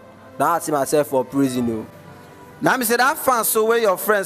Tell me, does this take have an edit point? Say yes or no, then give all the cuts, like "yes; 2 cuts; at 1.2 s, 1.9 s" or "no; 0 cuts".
no; 0 cuts